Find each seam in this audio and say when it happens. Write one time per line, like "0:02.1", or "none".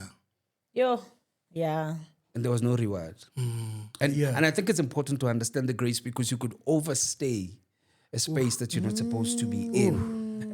0:04.0